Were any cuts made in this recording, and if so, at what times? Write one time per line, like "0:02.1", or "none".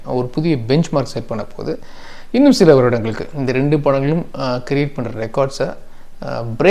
none

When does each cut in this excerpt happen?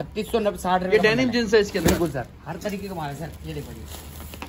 none

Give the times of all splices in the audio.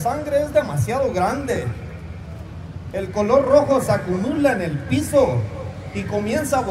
0:01.3

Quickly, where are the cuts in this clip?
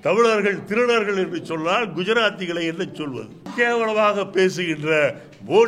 0:03.5

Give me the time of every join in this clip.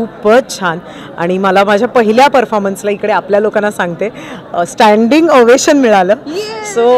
none

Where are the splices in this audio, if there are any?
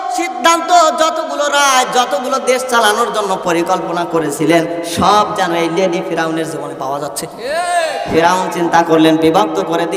0:08.1

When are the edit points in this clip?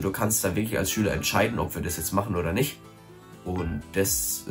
none

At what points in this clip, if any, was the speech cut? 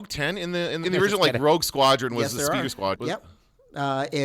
0:00.8
0:03.0

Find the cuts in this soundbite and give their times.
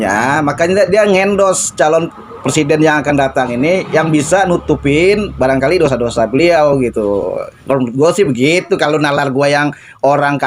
none

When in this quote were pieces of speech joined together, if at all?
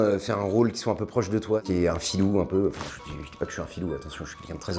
0:01.6

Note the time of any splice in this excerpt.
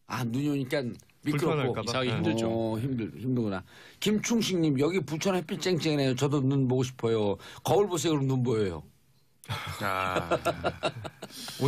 none

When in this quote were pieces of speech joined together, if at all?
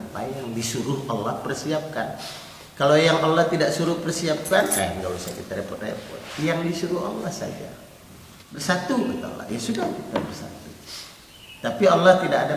0:08.7

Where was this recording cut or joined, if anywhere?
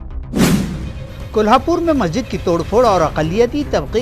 none

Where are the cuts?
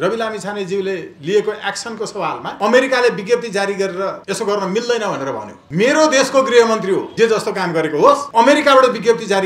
0:02.5
0:04.2
0:05.5
0:07.1
0:08.2

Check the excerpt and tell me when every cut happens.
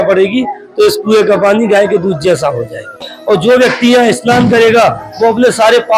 0:03.4

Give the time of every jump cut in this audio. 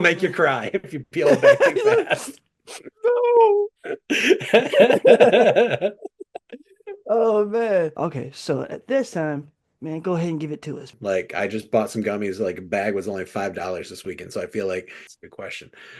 0:07.9
0:10.9
0:15.0

